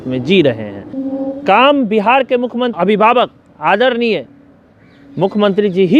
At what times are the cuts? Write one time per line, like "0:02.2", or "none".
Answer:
0:01.0
0:02.7